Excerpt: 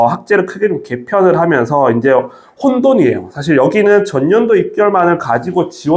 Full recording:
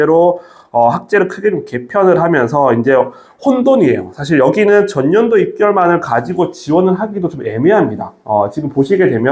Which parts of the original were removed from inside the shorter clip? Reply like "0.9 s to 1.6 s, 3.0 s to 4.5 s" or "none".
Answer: none